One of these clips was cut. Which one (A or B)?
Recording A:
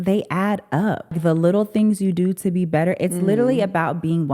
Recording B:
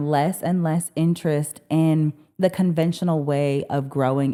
A